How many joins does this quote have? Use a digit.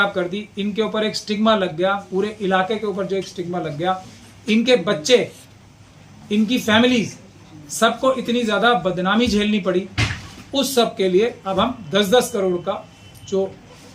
0